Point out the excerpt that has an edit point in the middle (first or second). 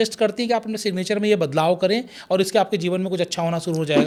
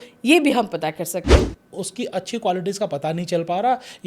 second